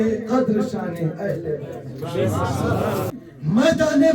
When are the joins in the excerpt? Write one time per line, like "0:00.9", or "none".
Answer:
0:03.1